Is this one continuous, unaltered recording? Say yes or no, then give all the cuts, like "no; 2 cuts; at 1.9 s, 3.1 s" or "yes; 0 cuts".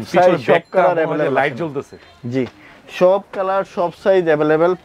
yes; 0 cuts